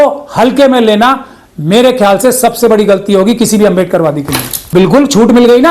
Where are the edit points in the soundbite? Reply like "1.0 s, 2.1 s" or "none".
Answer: 4.7 s